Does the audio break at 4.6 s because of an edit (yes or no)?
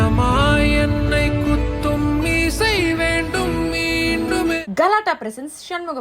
yes